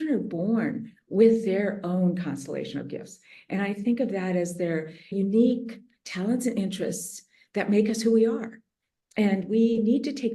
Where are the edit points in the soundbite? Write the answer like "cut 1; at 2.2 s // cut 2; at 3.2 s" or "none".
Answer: cut 1; at 5.1 s